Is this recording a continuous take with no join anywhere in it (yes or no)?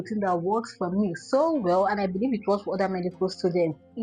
yes